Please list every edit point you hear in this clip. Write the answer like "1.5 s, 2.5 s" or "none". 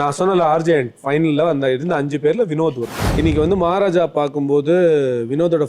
3.0 s